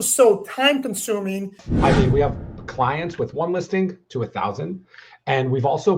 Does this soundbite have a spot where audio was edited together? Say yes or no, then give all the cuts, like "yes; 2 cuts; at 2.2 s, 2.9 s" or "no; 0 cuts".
yes; 1 cut; at 1.7 s